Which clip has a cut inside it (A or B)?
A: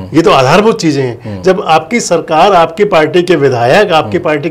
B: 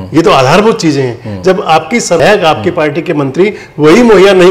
B